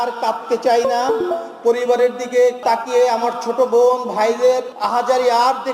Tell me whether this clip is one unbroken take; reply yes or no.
no